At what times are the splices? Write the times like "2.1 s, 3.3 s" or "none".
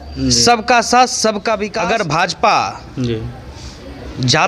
1.7 s